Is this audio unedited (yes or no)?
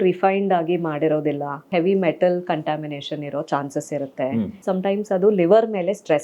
no